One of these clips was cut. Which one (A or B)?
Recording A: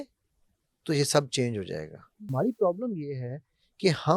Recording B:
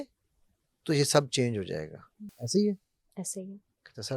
A